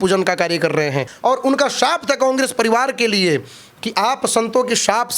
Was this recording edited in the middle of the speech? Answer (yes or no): yes